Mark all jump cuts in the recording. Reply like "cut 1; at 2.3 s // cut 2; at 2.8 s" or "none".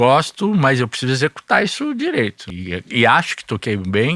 cut 1; at 2.4 s